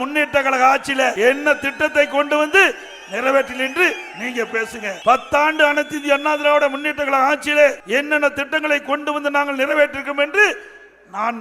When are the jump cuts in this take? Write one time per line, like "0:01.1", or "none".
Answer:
0:01.1
0:05.0
0:07.8